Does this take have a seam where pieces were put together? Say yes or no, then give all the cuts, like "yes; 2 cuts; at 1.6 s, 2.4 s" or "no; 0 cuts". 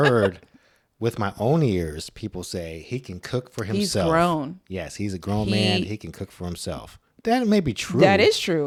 no; 0 cuts